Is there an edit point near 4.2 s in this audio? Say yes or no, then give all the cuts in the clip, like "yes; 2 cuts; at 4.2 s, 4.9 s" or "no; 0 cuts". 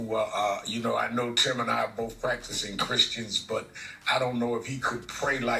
yes; 1 cut; at 4.2 s